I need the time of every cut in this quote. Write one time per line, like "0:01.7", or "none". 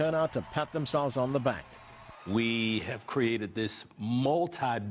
0:01.2